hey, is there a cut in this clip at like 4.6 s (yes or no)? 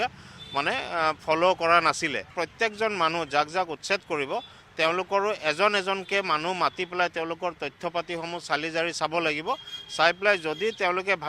no